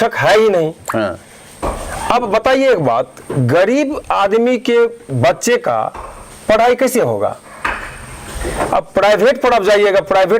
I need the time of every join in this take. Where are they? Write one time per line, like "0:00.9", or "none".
none

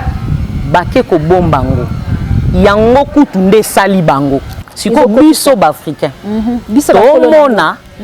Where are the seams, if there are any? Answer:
0:04.5

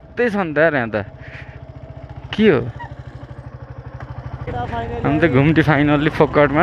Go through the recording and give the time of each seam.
0:04.5

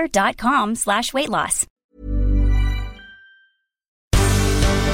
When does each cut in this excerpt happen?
0:01.6
0:04.0

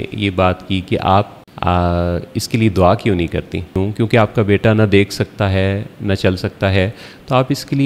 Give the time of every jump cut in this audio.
0:01.4
0:03.8

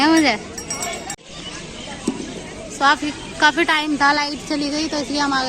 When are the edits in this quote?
0:01.2

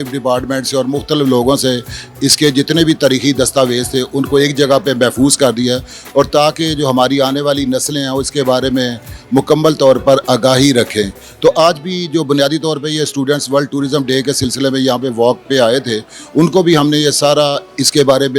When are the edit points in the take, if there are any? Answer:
none

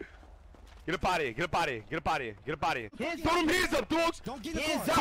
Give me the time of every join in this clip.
0:02.9

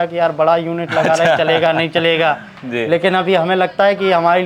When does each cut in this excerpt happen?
none

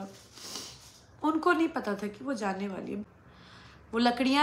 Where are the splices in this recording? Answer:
0:03.1

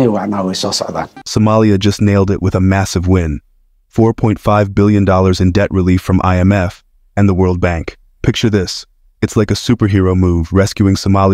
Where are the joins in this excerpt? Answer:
0:01.2

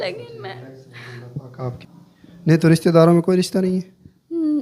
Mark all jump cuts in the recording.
0:01.8

